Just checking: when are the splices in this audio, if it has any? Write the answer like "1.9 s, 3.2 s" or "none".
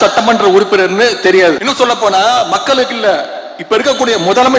1.6 s